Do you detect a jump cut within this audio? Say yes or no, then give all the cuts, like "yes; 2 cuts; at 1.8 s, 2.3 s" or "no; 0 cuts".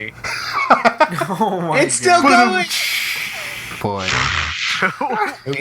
yes; 1 cut; at 3.6 s